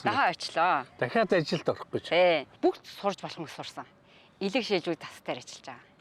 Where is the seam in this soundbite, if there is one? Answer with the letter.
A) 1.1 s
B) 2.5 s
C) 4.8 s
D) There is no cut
B